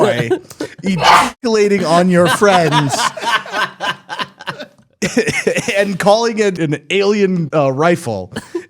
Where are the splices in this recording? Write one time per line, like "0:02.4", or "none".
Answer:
0:06.6
0:07.5